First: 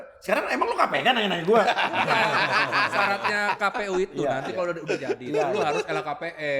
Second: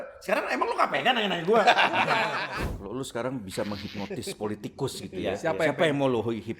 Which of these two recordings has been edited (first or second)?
second